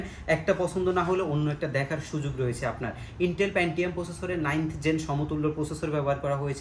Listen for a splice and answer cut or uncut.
uncut